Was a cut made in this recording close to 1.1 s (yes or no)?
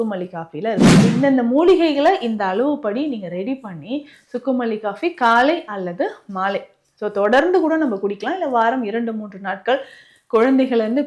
yes